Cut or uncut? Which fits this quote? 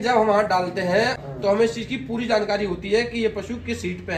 cut